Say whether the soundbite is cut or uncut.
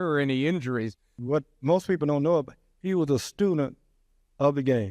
cut